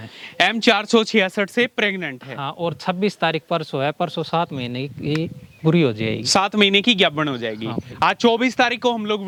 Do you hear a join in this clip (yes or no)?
no